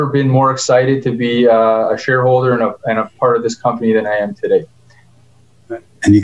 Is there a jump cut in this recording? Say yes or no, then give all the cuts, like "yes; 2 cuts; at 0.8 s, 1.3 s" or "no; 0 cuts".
no; 0 cuts